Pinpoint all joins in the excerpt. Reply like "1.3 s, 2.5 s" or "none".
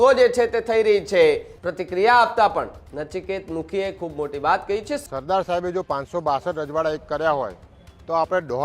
1.5 s, 5.0 s